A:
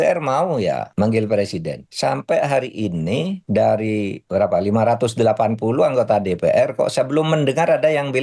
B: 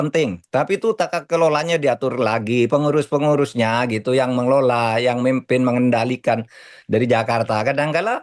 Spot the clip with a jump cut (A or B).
A